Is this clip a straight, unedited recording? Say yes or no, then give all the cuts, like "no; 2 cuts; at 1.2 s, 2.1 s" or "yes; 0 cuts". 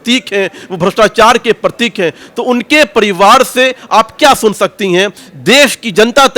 yes; 0 cuts